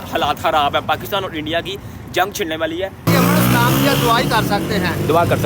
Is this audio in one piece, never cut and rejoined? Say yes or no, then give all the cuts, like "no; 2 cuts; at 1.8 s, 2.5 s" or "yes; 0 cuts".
no; 1 cut; at 3.1 s